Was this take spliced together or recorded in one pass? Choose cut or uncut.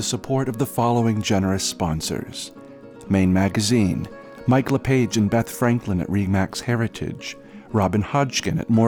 uncut